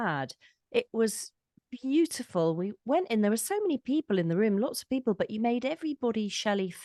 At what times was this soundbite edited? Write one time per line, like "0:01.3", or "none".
none

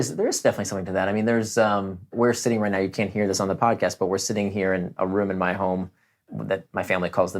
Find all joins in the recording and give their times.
0:02.1
0:04.9
0:06.3

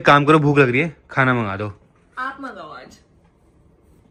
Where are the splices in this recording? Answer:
none

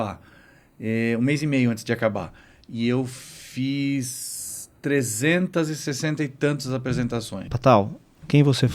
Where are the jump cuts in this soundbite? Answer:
0:07.4

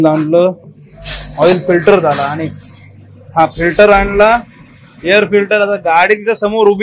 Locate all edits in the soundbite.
none

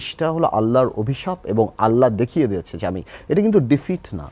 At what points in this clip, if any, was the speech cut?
none

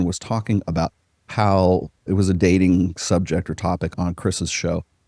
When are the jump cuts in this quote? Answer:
0:02.1
0:03.9

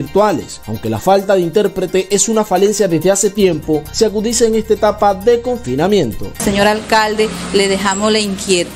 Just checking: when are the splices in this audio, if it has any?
0:06.4

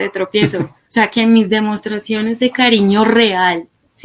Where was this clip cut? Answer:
none

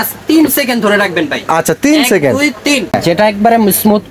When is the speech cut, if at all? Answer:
0:03.0

